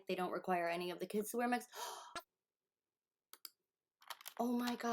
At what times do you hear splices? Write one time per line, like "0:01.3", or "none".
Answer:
0:02.2